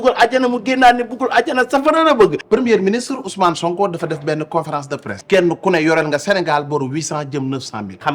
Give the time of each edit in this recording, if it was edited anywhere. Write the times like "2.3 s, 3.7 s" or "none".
2.4 s, 5.1 s